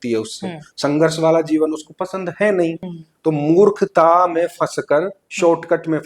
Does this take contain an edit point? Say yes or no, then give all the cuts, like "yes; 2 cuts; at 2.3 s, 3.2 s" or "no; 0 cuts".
no; 0 cuts